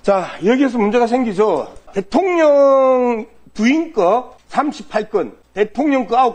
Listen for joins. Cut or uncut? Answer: cut